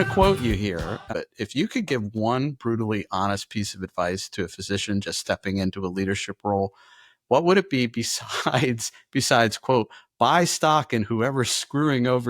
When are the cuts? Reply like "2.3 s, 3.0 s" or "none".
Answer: 1.1 s